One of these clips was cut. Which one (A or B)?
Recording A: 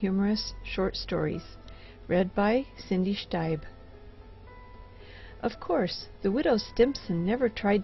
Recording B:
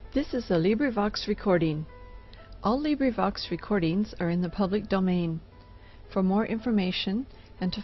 A